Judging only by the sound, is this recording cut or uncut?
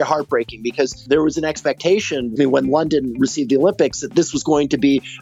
cut